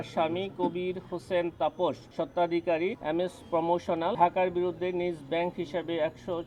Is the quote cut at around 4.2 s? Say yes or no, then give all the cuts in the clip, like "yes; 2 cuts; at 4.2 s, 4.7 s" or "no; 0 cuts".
yes; 3 cuts; at 2.0 s, 3.0 s, 4.2 s